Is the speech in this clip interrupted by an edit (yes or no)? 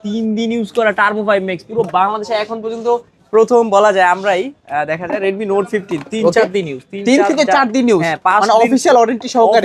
no